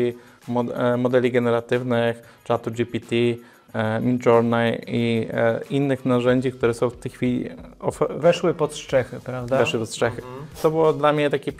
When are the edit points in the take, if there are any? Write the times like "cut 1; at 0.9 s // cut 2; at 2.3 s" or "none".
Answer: cut 1; at 10.6 s